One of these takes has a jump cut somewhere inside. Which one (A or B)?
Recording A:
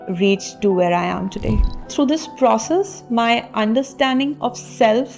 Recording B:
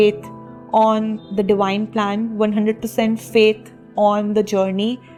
A